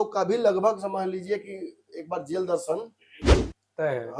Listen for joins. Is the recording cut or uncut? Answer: uncut